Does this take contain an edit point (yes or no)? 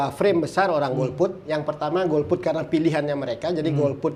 no